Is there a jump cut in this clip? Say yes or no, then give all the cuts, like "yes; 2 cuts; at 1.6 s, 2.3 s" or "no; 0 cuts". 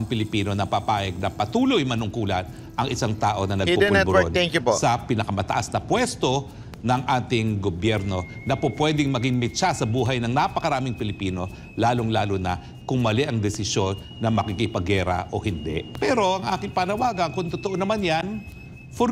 yes; 1 cut; at 15.9 s